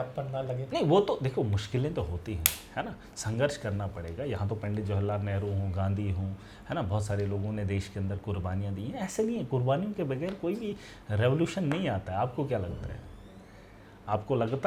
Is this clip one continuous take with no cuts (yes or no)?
yes